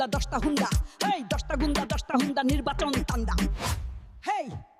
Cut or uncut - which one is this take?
uncut